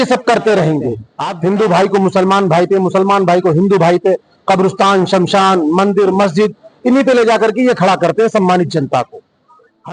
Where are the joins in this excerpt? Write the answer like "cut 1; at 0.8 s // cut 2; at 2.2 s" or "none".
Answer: cut 1; at 1.2 s